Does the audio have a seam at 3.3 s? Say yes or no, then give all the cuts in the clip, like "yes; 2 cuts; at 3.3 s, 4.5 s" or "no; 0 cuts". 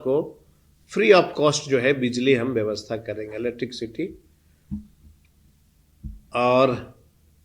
no; 0 cuts